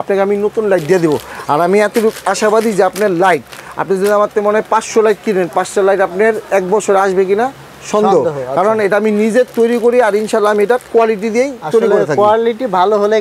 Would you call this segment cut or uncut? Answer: uncut